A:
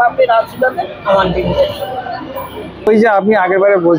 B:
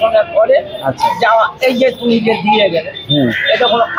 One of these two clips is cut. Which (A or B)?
A